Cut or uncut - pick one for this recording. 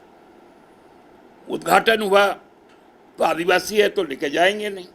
cut